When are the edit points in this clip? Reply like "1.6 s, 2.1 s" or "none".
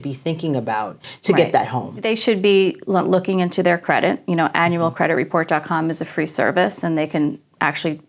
1.1 s, 2.0 s